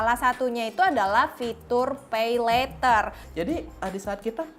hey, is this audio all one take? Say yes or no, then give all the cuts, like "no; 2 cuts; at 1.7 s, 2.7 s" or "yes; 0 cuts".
no; 1 cut; at 3.2 s